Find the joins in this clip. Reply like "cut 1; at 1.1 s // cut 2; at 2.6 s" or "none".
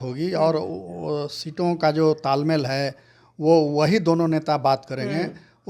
none